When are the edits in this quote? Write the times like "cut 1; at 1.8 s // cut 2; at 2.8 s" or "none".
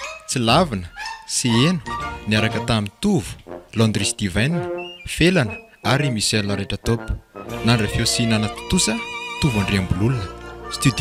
none